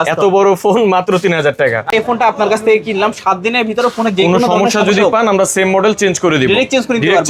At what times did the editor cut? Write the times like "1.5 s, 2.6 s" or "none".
1.9 s